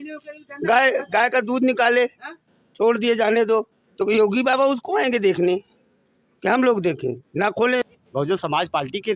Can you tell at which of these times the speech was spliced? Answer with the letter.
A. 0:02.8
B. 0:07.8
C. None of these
B